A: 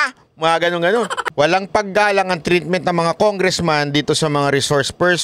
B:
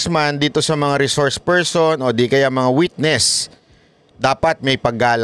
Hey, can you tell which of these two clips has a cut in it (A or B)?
A